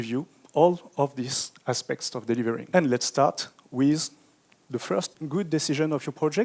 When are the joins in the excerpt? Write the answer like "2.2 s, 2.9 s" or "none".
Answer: 2.6 s, 5.1 s